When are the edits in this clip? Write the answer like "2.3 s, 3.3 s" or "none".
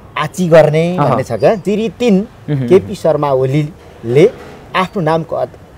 1.6 s